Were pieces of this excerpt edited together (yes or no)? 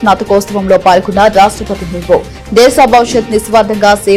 no